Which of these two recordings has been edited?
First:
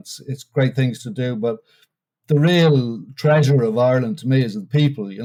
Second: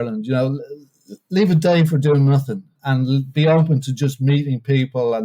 second; 1 cut; at 2.8 s

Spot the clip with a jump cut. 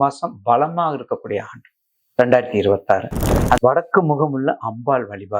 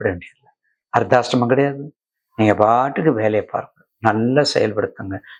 first; 1 cut; at 3.6 s

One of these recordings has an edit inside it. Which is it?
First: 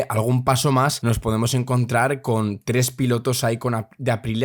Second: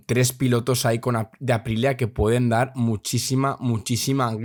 first; 1 cut; at 1.0 s

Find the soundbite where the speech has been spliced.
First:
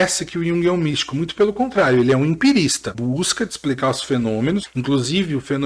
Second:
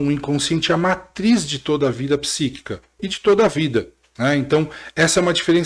first; 2 cuts; at 2.9 s, 4.6 s

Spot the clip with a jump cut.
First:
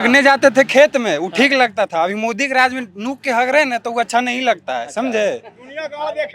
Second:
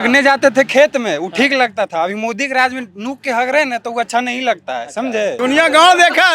second; 1 cut; at 5.4 s

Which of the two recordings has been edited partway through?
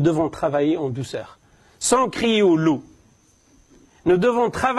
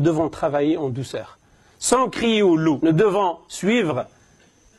second; 1 cut; at 2.8 s

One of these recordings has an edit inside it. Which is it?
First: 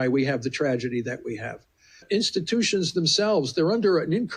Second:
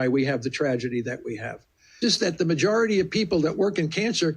second; 1 cut; at 2.0 s

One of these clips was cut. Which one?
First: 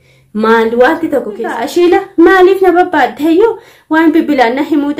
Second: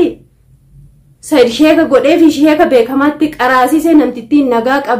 first; 1 cut; at 1.6 s

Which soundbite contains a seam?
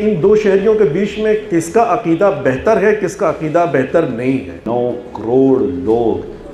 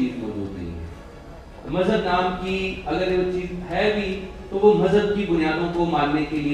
first; 1 cut; at 4.6 s

